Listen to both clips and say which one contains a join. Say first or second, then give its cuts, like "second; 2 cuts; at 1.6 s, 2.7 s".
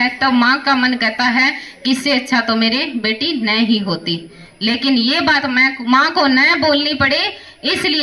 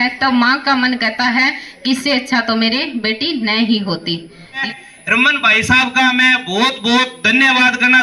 second; 1 cut; at 4.6 s